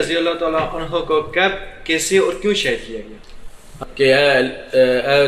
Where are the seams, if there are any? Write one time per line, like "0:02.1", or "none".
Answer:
0:03.7